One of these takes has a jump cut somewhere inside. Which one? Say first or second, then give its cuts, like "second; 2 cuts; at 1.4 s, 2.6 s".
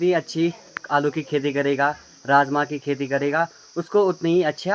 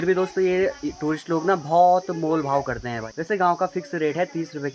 second; 1 cut; at 3.1 s